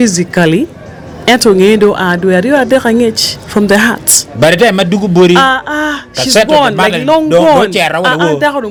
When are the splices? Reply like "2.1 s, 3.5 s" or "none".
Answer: none